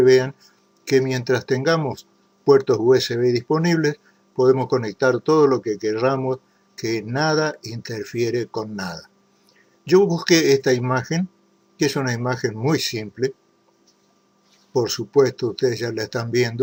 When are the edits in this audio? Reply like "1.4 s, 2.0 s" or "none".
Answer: none